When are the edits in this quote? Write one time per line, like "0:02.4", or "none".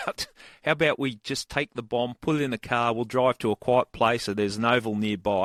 none